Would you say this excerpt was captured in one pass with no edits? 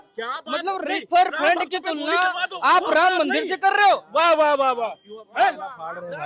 yes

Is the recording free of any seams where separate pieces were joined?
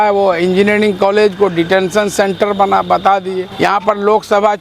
no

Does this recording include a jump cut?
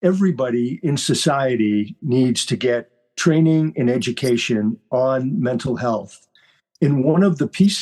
no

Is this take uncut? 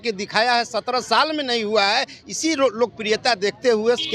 yes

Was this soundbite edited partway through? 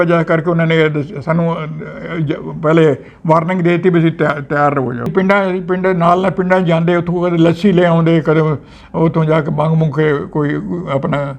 yes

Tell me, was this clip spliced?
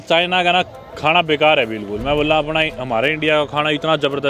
no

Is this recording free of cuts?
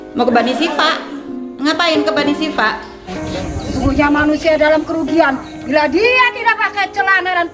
no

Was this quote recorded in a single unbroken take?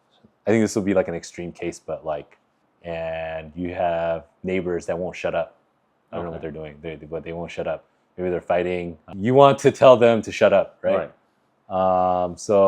no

